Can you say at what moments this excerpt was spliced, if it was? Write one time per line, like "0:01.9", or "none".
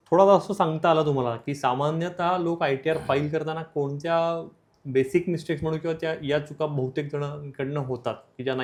none